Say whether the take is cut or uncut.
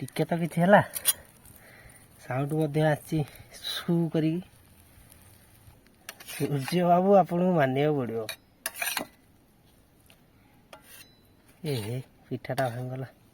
cut